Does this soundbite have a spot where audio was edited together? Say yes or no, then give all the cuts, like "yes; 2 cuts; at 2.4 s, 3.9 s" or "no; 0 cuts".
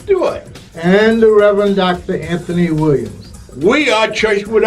no; 0 cuts